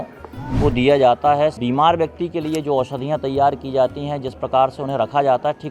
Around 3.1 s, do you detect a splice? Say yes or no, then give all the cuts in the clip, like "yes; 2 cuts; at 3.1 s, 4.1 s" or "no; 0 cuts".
no; 1 cut; at 1.6 s